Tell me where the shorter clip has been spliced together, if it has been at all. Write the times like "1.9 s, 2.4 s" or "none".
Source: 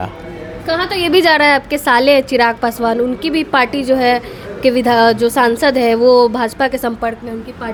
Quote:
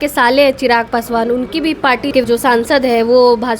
2.2 s